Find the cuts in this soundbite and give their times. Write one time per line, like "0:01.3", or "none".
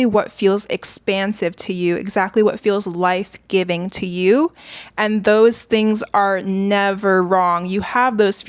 none